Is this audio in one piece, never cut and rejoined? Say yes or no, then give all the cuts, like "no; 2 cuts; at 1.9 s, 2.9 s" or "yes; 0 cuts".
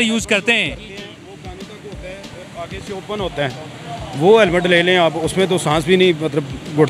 yes; 0 cuts